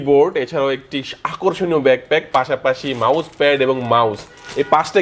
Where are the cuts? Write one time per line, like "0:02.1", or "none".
none